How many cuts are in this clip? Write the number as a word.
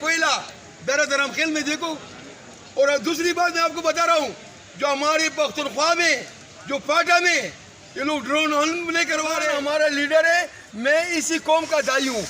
one